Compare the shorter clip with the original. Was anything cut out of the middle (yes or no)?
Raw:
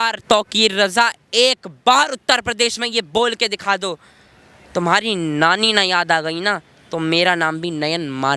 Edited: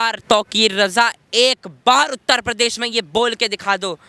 no